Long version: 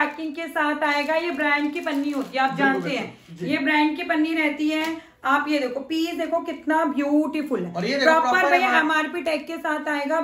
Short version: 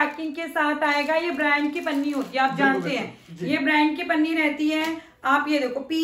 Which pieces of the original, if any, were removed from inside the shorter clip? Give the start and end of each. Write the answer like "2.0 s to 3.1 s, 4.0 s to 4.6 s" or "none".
none